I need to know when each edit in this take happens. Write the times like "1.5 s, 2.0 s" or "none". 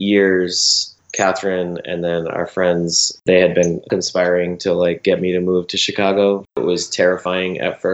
3.2 s, 3.9 s, 6.5 s